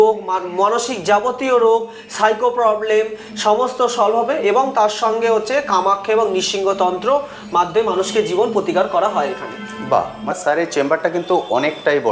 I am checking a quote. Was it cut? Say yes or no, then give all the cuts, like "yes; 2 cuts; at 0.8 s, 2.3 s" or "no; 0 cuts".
yes; 1 cut; at 10.3 s